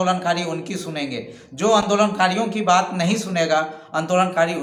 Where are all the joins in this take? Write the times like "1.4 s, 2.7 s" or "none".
none